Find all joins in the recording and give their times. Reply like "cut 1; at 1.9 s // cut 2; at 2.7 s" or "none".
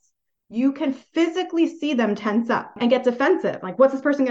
cut 1; at 2.7 s